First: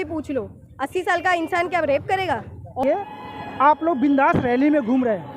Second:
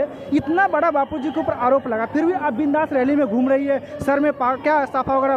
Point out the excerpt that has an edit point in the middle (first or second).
first